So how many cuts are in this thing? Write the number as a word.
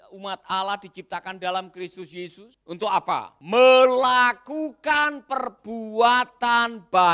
two